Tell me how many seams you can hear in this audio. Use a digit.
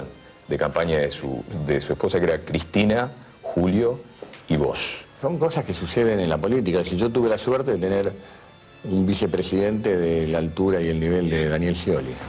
1